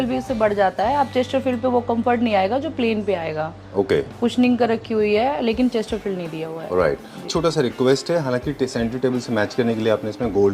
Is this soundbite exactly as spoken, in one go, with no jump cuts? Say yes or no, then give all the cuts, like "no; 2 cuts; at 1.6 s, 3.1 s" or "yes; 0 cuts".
no; 1 cut; at 7.3 s